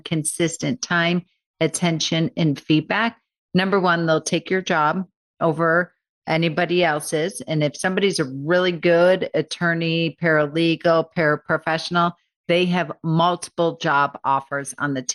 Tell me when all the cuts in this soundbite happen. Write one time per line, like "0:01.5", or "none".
none